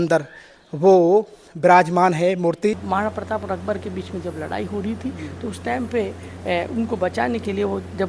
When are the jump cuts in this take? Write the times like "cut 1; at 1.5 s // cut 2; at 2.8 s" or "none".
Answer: cut 1; at 2.8 s